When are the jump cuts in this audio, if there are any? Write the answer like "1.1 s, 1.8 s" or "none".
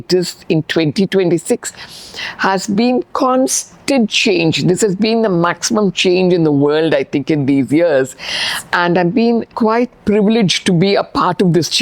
9.5 s